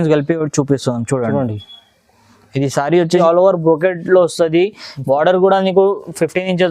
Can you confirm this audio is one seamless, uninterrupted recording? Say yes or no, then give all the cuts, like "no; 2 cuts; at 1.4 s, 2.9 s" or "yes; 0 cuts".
no; 1 cut; at 3.2 s